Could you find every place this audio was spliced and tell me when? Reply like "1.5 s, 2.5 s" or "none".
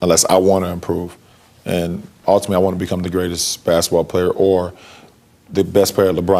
none